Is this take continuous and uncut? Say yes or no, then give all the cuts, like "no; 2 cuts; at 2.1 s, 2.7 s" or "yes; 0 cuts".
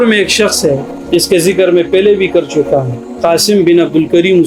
yes; 0 cuts